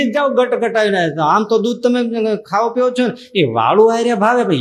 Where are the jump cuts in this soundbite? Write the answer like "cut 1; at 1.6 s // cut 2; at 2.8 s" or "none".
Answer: none